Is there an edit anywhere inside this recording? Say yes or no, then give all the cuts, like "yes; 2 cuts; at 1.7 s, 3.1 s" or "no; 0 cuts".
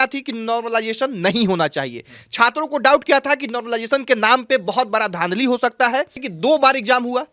yes; 1 cut; at 6.2 s